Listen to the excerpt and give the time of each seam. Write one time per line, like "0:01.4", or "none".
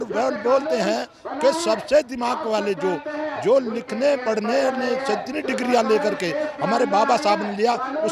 none